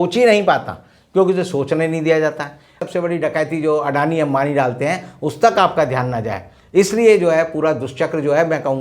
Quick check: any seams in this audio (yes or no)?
yes